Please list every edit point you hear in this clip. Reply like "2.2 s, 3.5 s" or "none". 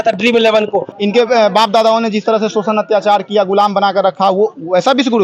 0.9 s